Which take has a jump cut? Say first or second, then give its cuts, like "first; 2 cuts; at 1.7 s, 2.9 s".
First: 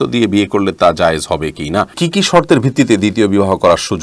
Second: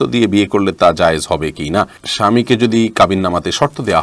first; 1 cut; at 2.0 s